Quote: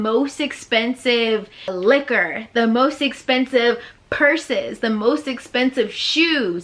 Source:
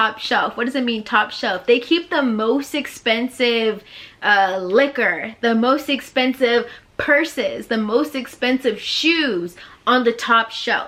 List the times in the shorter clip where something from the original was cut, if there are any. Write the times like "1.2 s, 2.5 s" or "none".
1.7 s